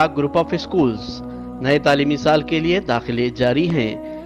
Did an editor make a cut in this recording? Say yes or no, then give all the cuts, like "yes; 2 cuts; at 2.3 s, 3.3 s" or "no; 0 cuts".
no; 0 cuts